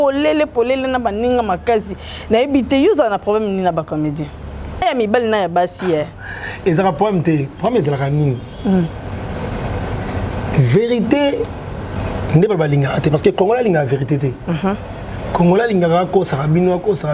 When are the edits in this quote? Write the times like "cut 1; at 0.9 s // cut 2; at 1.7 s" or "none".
cut 1; at 4.8 s